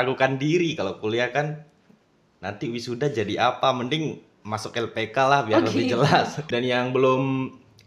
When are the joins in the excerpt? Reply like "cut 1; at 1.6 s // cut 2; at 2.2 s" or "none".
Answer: cut 1; at 6.4 s